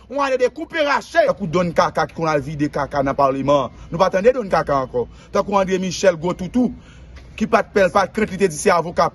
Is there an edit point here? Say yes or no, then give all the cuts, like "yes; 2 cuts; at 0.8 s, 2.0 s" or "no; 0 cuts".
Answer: yes; 1 cut; at 1.3 s